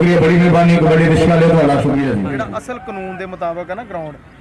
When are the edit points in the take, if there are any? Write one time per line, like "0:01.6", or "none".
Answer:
0:02.4